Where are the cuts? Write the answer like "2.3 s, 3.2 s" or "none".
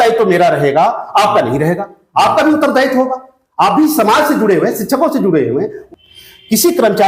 5.8 s

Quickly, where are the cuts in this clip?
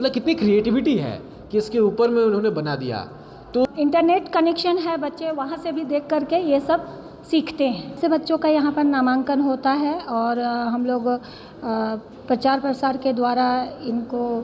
3.6 s, 8.0 s

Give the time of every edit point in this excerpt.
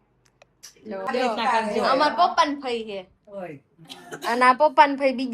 1.1 s

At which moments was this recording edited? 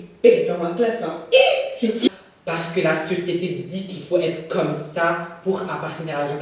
2.1 s

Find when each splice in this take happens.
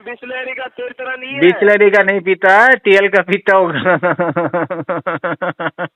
none

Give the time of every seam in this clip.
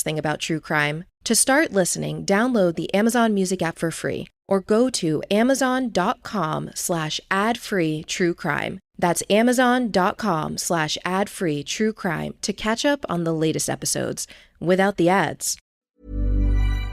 15.8 s

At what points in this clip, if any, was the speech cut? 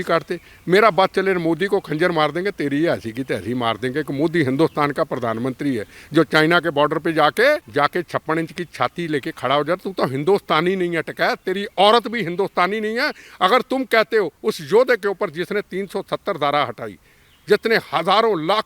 7.7 s

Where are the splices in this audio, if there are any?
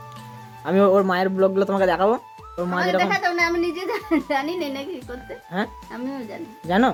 none

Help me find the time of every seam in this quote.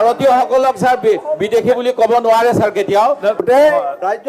3.4 s

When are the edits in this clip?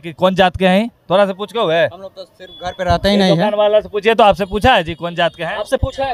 none

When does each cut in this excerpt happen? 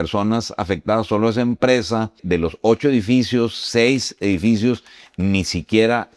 2.2 s

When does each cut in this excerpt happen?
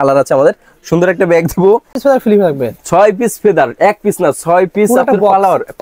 2.0 s

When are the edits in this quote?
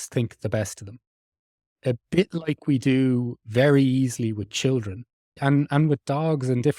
5.4 s

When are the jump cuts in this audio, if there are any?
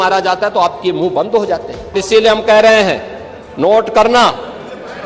2.0 s

